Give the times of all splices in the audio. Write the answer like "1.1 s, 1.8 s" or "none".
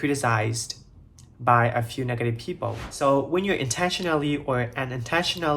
2.9 s